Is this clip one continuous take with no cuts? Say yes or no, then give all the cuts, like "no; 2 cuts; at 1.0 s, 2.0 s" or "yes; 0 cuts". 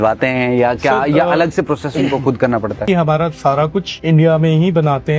no; 2 cuts; at 2.8 s, 3.9 s